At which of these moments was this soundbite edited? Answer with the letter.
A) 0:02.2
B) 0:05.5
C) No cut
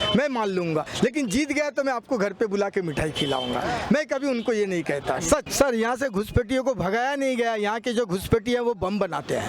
B